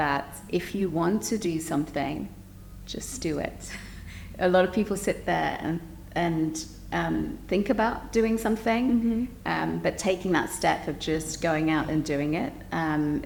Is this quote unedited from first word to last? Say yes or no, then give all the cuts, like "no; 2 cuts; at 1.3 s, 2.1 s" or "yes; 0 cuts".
yes; 0 cuts